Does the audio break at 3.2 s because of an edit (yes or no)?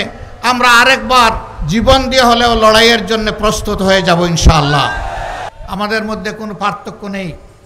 no